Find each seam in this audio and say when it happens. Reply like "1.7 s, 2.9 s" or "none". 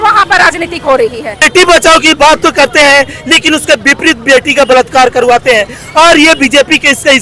1.4 s